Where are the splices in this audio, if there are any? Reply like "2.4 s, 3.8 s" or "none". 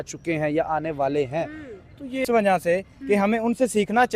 2.2 s